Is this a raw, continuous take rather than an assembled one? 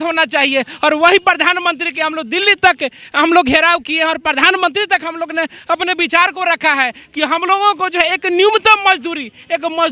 yes; 0 cuts

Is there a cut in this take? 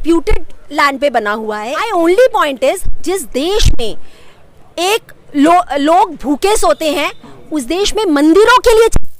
yes; 1 cut; at 1.8 s

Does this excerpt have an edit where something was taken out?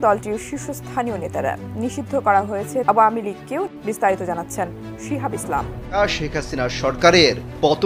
yes; 3 cuts; at 2.8 s, 3.7 s, 6.0 s

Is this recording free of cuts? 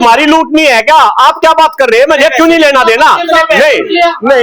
yes; 0 cuts

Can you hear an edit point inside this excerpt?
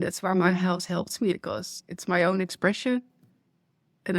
yes; 1 cut; at 1.3 s

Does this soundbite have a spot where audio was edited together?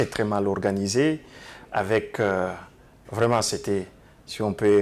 no; 0 cuts

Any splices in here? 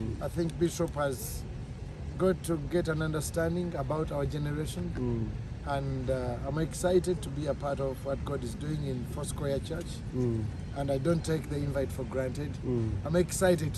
no; 0 cuts

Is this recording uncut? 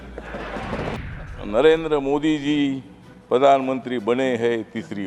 no; 1 cut; at 1.0 s

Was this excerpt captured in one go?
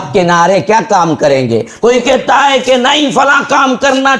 yes; 0 cuts

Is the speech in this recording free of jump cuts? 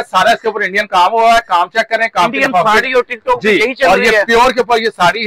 yes; 0 cuts

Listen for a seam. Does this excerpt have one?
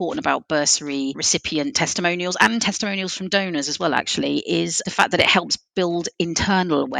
yes; 2 cuts; at 1.2 s, 4.8 s

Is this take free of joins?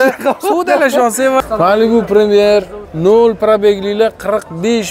no; 2 cuts; at 1.4 s, 2.8 s

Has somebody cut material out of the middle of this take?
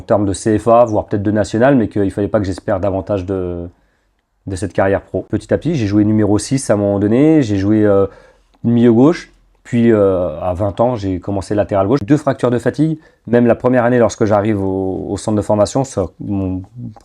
yes; 2 cuts; at 5.3 s, 12.0 s

